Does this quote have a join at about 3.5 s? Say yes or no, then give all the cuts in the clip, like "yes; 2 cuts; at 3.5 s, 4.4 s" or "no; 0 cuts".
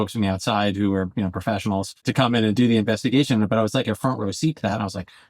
no; 1 cut; at 2.1 s